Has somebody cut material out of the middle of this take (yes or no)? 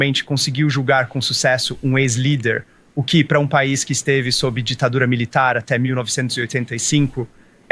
no